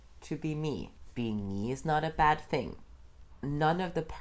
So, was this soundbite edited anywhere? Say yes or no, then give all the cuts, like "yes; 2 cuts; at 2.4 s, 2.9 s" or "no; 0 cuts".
yes; 2 cuts; at 1.0 s, 3.3 s